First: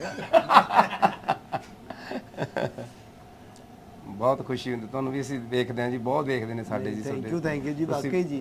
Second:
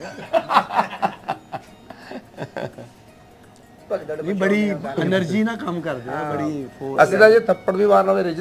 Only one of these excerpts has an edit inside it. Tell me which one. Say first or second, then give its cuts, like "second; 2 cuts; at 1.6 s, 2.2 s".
second; 1 cut; at 3.8 s